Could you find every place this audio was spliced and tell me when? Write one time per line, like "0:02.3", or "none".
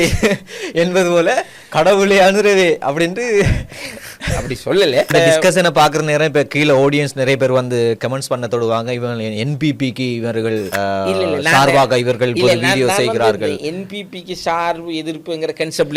0:05.1
0:10.7